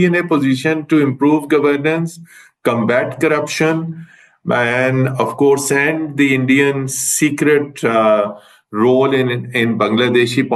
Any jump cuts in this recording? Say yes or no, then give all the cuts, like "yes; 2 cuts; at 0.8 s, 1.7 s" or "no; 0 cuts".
no; 0 cuts